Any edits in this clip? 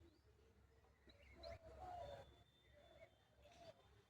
no; 0 cuts

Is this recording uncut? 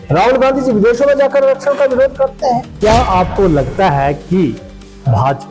no; 1 cut; at 2.7 s

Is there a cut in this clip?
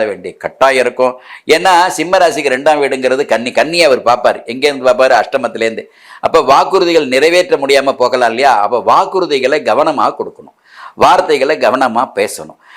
no; 0 cuts

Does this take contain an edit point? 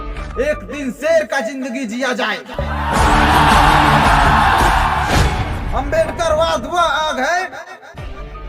yes; 1 cut; at 5.2 s

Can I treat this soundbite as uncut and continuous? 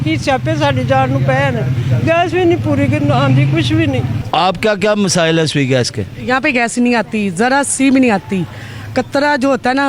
yes; 0 cuts

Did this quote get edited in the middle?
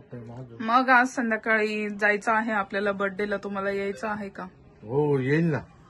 no; 0 cuts

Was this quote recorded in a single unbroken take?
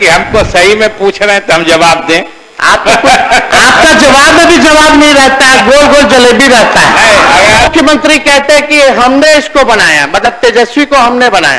no; 1 cut; at 7.7 s

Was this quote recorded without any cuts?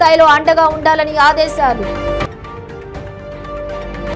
yes; 0 cuts

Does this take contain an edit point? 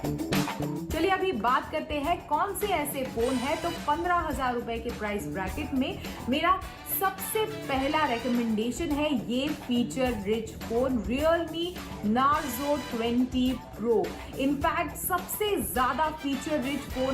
yes; 1 cut; at 8.1 s

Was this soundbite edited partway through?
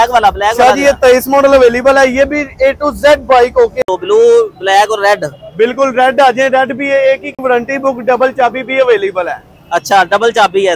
yes; 2 cuts; at 3.8 s, 7.3 s

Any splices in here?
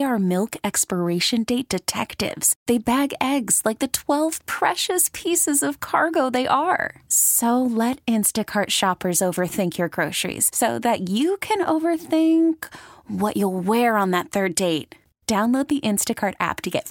no; 0 cuts

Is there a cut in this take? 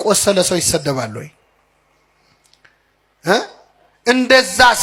no; 0 cuts

